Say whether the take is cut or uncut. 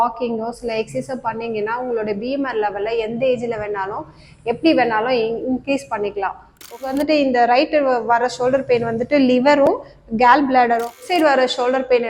cut